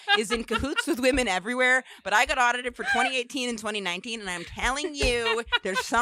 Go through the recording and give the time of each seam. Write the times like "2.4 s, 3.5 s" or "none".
none